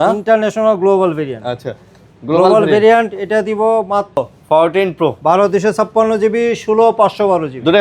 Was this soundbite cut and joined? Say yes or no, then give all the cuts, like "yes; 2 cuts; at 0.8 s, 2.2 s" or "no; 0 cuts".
yes; 1 cut; at 4.2 s